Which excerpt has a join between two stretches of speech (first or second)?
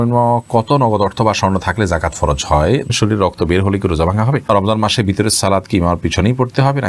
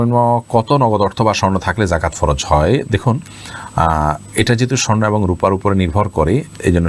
first